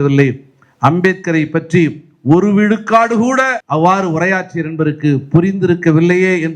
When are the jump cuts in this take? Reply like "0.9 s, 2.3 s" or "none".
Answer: 3.6 s